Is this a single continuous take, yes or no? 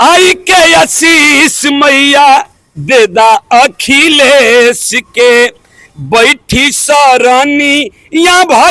yes